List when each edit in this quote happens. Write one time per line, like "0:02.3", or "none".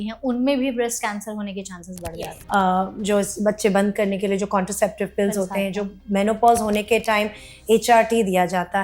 0:02.1